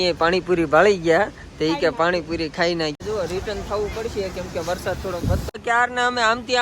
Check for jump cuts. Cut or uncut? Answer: cut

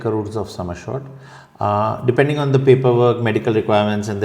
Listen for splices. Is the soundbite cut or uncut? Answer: uncut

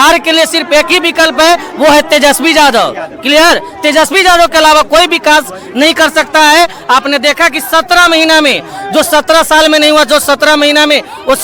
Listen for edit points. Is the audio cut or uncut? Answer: uncut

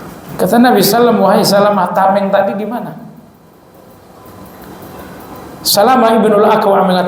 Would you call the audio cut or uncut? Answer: uncut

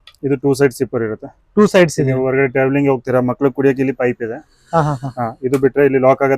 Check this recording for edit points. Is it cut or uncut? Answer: uncut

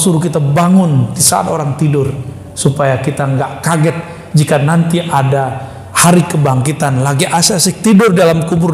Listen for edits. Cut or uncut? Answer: uncut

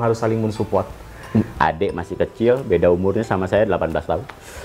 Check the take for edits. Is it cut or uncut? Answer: cut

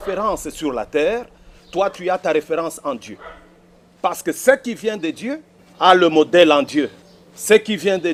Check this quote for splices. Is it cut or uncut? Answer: uncut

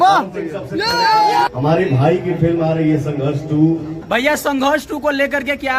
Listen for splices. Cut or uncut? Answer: cut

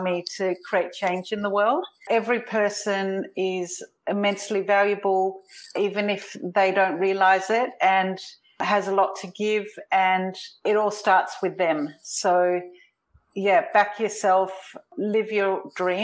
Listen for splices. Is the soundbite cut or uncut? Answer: cut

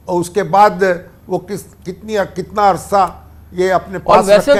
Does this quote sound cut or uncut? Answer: uncut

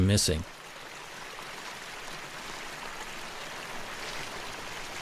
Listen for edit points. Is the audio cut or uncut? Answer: uncut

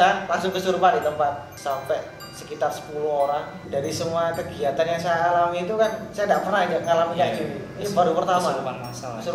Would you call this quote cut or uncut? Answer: cut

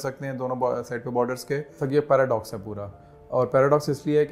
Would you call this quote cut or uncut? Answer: cut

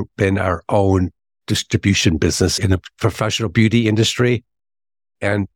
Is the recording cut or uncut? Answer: cut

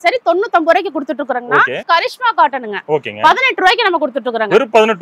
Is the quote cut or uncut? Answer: cut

